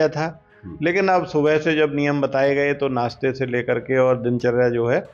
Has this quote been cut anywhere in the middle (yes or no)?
no